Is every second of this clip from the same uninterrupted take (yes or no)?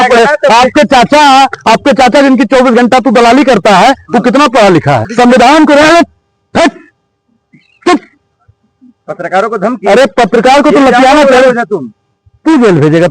no